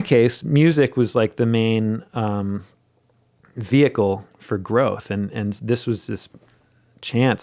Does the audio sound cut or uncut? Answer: uncut